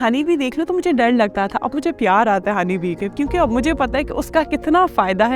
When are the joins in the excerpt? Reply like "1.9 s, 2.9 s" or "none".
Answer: none